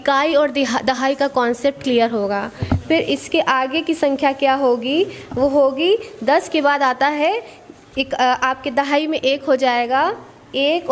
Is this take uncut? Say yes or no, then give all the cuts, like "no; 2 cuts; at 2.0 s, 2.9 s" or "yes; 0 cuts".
yes; 0 cuts